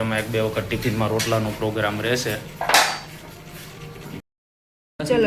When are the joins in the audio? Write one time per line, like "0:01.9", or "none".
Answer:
0:04.3